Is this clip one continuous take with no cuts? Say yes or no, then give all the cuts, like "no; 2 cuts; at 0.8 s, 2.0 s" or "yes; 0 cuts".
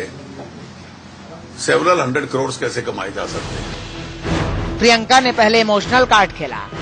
yes; 0 cuts